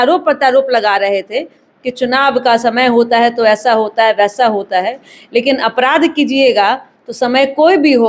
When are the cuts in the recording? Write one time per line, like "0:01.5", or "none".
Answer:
none